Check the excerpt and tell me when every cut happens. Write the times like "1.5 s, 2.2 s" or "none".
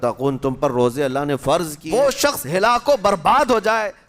1.8 s